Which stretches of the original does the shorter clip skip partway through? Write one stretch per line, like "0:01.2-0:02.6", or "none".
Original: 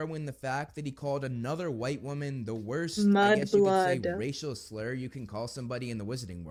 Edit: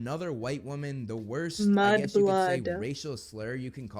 none